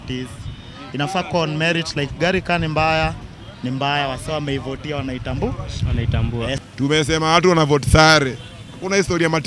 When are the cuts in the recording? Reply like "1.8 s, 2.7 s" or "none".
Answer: 6.5 s